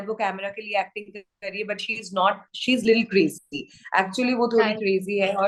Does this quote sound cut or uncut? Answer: uncut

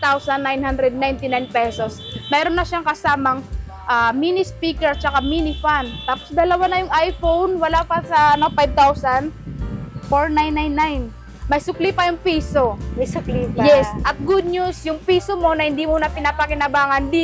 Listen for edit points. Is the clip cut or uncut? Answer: uncut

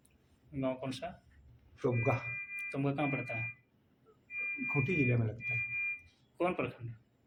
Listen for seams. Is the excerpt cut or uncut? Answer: uncut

